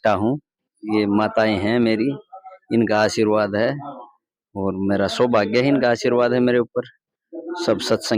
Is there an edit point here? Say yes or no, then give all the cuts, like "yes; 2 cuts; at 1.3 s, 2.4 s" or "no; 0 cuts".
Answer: no; 0 cuts